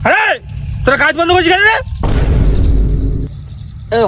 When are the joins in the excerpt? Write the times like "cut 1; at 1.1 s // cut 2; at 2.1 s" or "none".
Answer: cut 1; at 1.9 s // cut 2; at 3.2 s

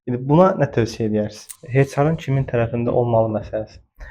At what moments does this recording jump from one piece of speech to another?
cut 1; at 1.4 s

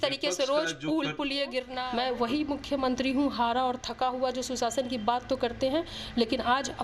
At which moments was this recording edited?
cut 1; at 1.8 s

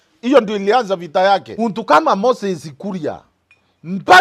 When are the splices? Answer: cut 1; at 1.5 s

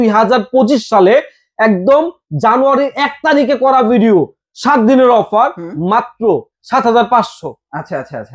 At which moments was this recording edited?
cut 1; at 6.6 s

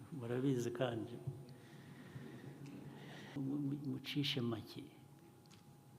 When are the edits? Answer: cut 1; at 3.4 s

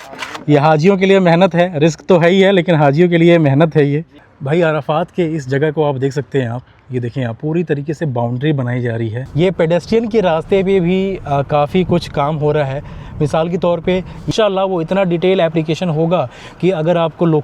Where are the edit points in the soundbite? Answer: cut 1; at 4.3 s // cut 2; at 9.2 s // cut 3; at 14.3 s

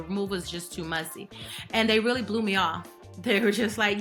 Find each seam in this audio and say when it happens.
none

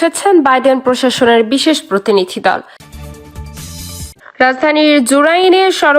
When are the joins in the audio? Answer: cut 1; at 2.8 s

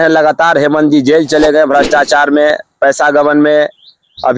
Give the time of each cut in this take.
none

